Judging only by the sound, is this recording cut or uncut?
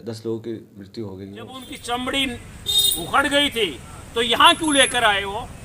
cut